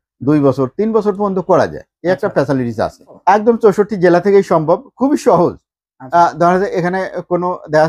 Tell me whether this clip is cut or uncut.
cut